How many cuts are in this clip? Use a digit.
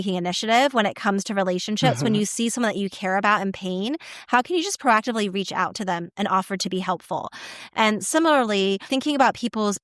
1